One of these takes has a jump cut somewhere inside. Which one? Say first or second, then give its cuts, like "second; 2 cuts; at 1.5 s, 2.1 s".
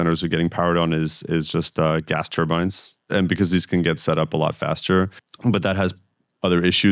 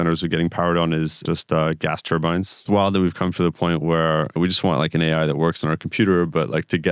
second; 3 cuts; at 1.2 s, 2.7 s, 4.3 s